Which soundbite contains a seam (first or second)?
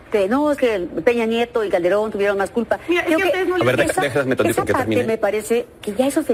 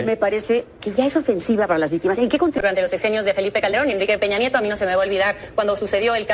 second